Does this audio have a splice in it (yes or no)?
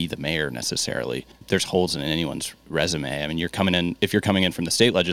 yes